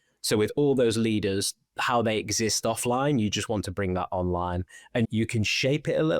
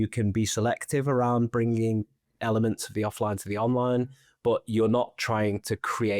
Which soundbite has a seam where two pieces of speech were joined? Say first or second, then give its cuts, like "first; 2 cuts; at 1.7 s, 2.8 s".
first; 1 cut; at 5.1 s